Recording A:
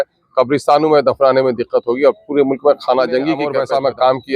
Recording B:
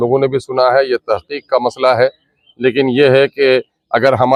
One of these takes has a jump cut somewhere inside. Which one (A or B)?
A